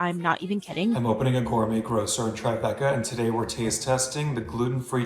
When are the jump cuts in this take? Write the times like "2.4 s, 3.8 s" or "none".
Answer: 1.0 s